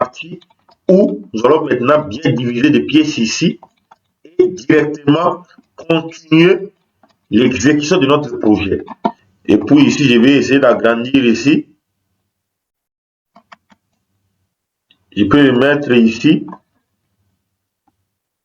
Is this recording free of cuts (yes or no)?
no